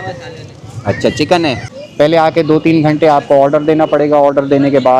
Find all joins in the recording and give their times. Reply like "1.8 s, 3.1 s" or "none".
1.7 s